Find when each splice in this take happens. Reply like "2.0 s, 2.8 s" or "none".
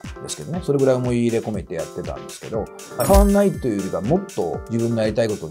3.0 s, 4.6 s